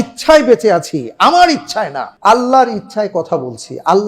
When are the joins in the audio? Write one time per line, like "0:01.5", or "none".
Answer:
0:02.0